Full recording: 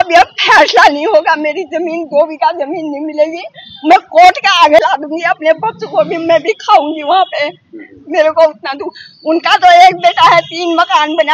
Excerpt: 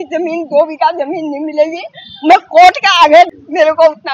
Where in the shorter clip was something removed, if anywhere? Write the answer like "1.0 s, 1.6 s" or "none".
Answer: 3.2 s